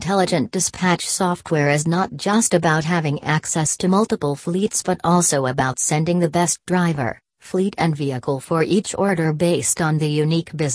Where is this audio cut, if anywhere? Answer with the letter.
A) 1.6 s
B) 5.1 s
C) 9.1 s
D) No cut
D